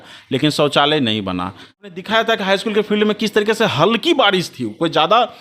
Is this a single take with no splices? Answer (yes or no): no